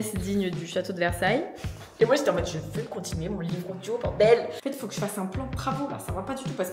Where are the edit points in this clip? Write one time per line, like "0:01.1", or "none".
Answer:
0:02.0
0:04.5

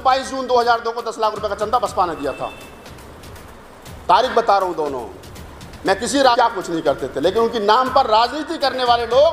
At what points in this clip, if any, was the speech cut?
0:06.4

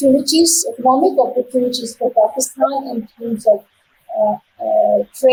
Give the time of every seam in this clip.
none

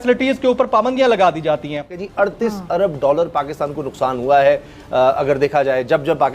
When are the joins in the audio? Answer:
0:02.0

